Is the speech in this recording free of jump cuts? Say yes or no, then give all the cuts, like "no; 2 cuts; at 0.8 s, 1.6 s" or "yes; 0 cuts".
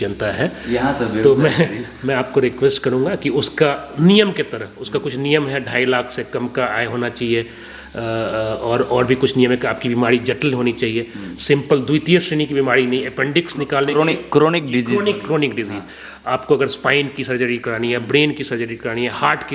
yes; 0 cuts